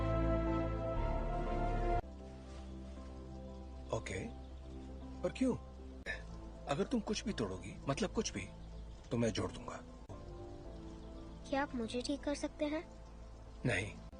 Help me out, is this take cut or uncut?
uncut